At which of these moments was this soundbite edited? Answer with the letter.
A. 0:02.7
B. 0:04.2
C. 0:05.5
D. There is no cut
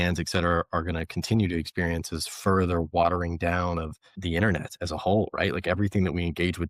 B